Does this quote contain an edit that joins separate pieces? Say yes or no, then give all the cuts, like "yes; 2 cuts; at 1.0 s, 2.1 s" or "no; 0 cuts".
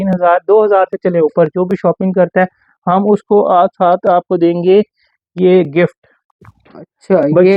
no; 0 cuts